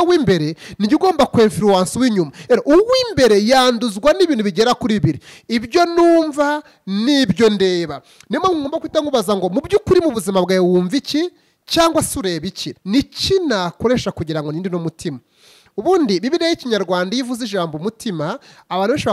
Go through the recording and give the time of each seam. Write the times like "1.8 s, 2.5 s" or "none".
12.7 s